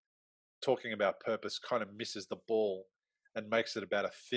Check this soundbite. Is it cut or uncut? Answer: uncut